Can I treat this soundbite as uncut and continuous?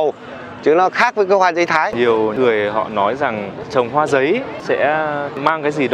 no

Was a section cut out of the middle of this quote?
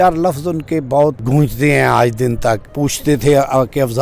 yes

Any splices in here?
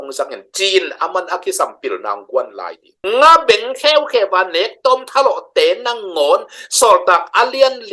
no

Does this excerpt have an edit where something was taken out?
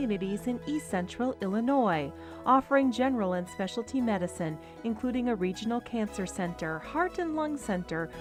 no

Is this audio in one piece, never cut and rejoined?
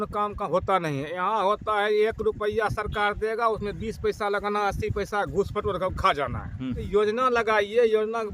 no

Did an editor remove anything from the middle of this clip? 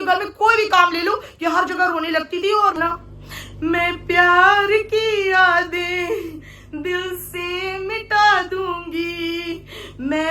yes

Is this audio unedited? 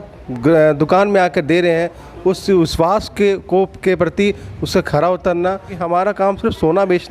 no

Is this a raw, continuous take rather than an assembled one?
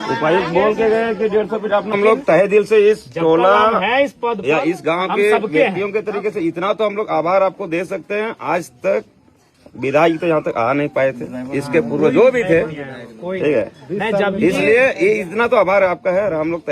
yes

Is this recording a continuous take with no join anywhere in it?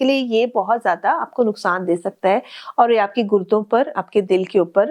yes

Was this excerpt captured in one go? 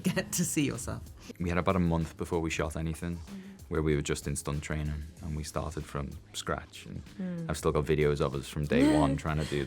no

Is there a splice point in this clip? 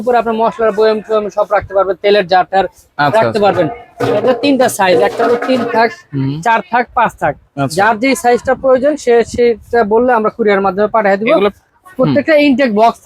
no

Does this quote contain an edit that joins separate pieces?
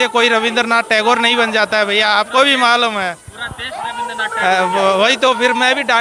no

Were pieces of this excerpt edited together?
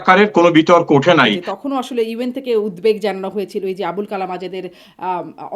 yes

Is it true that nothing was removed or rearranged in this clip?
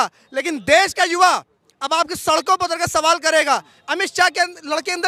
yes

